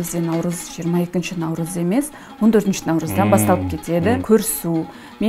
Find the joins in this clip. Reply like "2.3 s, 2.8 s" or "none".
4.2 s